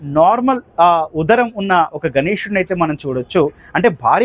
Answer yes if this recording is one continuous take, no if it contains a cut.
yes